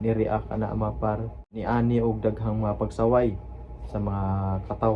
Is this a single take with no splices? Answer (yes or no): no